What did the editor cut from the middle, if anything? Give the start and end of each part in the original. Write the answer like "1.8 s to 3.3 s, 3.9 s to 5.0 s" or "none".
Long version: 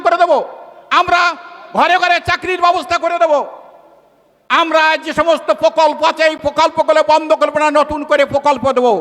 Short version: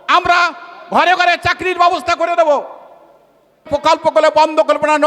4.5 s to 6.4 s